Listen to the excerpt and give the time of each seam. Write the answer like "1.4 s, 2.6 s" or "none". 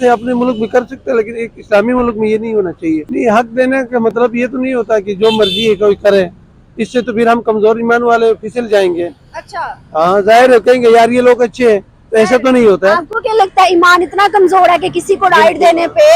3.0 s